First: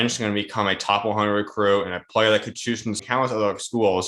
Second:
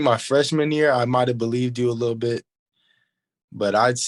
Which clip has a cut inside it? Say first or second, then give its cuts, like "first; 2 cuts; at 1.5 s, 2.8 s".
first; 1 cut; at 3.0 s